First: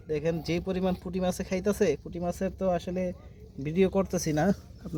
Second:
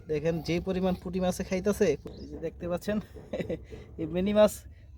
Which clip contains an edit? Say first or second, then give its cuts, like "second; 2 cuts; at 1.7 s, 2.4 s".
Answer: second; 1 cut; at 2.1 s